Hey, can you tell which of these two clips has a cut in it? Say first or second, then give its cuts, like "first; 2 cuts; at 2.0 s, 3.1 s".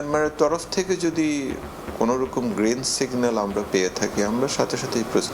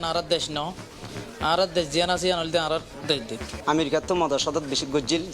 second; 1 cut; at 3.5 s